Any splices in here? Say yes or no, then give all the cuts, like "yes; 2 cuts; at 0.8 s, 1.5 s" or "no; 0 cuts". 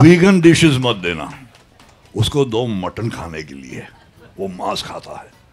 no; 0 cuts